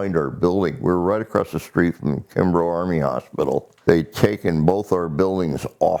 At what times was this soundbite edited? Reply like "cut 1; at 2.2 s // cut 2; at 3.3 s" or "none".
cut 1; at 3.7 s